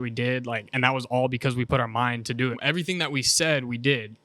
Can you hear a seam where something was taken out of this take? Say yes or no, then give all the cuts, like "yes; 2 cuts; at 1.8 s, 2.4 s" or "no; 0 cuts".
yes; 1 cut; at 2.6 s